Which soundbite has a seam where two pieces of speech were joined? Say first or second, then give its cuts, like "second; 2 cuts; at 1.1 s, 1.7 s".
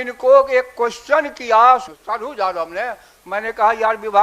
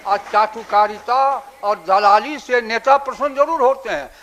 first; 1 cut; at 1.9 s